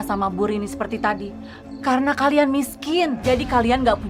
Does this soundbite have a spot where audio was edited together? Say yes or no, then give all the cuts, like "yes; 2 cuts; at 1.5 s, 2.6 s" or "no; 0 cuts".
no; 0 cuts